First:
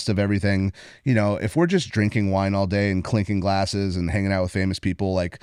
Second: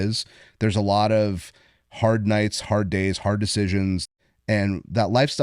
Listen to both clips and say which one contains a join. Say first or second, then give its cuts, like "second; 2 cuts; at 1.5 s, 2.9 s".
second; 1 cut; at 4.0 s